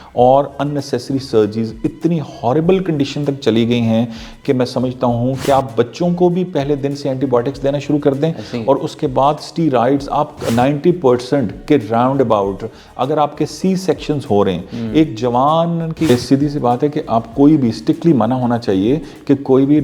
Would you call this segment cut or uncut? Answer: cut